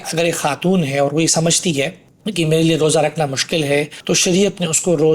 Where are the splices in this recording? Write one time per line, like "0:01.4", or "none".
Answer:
0:03.9